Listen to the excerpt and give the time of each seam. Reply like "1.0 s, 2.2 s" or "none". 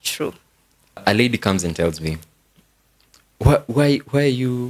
1.0 s